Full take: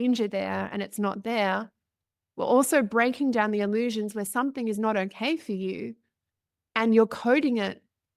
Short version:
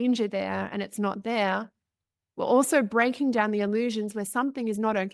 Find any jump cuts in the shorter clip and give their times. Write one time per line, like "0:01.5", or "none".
none